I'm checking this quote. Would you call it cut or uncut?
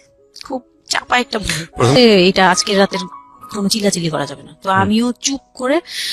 cut